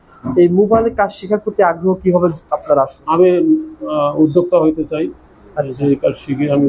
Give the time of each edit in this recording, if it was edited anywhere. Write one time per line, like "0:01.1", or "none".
none